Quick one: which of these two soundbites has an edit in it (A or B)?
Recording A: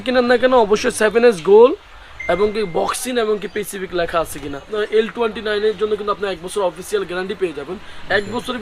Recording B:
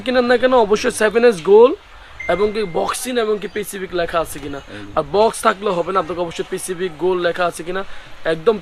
A